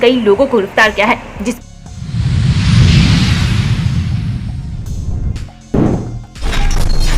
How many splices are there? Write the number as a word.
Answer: two